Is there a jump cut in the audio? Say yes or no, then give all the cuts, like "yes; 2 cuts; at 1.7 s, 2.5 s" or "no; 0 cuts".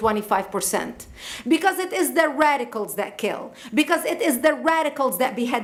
no; 0 cuts